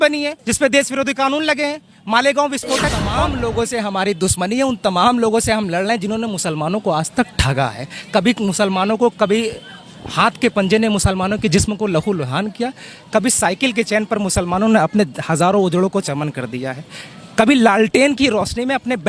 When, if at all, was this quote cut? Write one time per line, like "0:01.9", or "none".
0:03.1